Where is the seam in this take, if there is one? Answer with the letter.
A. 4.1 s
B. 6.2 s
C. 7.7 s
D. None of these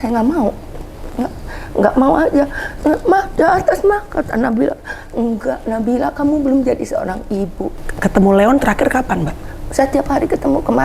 C